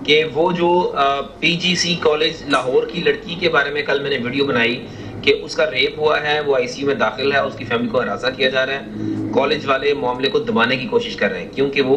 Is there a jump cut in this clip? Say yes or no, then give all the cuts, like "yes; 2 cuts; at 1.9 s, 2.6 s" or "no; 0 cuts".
no; 0 cuts